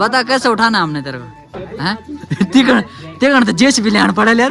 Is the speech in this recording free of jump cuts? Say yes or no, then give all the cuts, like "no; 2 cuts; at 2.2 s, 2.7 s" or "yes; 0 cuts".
yes; 0 cuts